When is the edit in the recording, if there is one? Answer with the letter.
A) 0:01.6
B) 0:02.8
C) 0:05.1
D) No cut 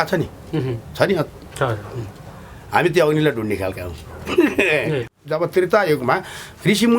C